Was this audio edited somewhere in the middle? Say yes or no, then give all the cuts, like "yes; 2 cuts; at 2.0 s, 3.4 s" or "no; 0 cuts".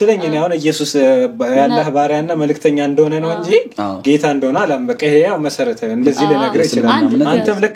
no; 0 cuts